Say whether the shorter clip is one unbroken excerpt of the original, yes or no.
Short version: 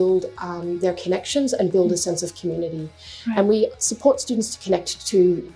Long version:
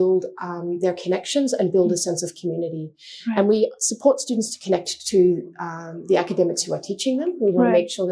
yes